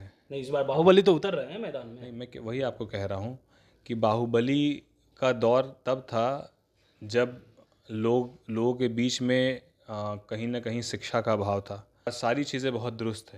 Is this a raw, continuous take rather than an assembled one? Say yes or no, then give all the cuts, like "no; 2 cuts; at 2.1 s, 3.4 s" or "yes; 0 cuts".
no; 1 cut; at 12.2 s